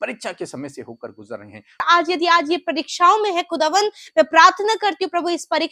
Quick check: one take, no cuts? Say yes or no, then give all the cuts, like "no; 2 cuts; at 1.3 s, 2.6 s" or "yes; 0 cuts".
no; 1 cut; at 1.8 s